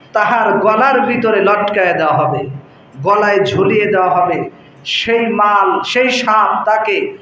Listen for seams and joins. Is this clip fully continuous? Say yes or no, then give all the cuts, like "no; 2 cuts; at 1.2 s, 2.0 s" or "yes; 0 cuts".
yes; 0 cuts